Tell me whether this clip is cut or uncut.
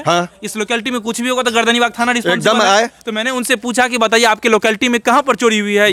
uncut